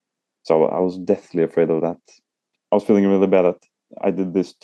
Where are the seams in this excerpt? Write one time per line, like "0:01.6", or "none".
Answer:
0:02.5